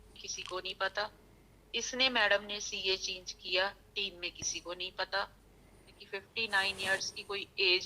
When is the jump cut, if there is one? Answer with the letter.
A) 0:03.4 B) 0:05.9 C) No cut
B